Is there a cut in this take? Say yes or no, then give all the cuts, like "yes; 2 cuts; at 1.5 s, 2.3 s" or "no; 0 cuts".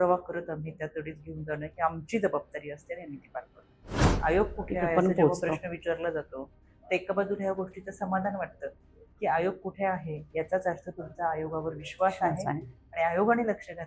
yes; 1 cut; at 4.2 s